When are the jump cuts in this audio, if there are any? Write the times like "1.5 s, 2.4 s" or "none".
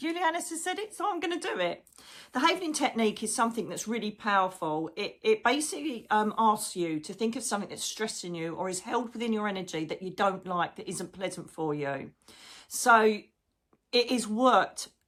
none